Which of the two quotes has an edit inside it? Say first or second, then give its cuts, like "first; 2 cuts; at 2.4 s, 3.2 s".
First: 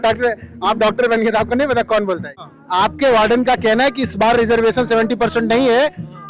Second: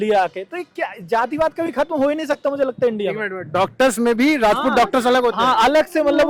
first; 1 cut; at 2.4 s